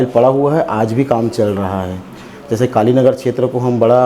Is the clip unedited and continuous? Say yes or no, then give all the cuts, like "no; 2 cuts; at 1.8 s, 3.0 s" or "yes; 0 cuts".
yes; 0 cuts